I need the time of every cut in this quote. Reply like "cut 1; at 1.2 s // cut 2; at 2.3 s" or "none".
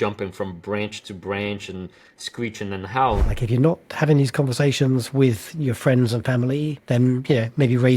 cut 1; at 3.2 s // cut 2; at 6.8 s